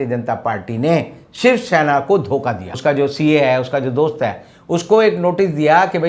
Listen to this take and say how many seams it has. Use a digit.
1